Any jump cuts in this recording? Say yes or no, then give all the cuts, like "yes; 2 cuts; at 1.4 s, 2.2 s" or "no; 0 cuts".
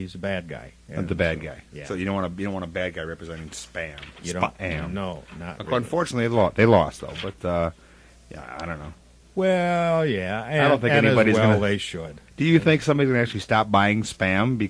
no; 0 cuts